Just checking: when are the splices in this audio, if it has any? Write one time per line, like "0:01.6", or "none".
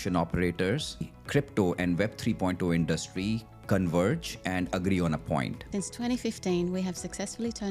0:01.2
0:06.0